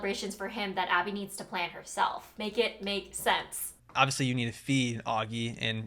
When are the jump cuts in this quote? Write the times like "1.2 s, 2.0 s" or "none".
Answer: 3.6 s